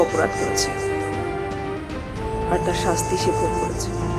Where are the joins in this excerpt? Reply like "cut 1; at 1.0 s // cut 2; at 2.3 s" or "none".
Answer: none